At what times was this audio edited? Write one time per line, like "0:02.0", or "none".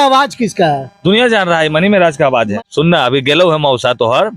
0:02.5